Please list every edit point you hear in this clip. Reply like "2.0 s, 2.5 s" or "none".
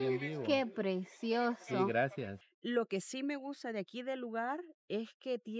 2.3 s